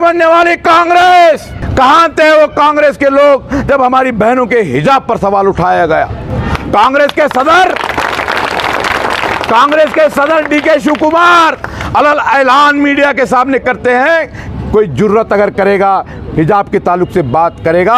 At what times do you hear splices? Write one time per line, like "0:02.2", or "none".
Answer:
0:01.6